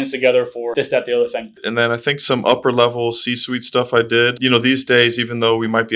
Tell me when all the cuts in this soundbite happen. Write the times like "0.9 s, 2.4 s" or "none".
1.6 s